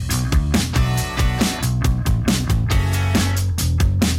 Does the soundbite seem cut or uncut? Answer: cut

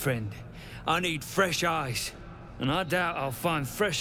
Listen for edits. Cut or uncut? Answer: uncut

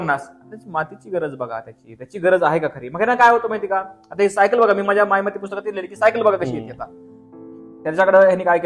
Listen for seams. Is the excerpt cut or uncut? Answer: uncut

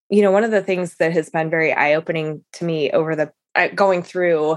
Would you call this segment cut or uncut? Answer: cut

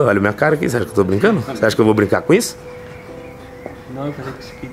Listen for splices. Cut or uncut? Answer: uncut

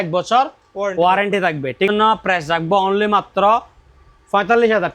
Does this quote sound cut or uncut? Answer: cut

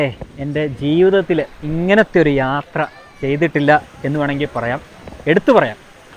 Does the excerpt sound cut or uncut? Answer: uncut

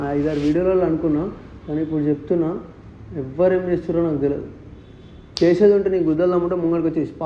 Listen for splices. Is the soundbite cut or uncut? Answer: uncut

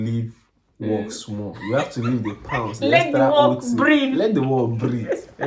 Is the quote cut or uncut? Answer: uncut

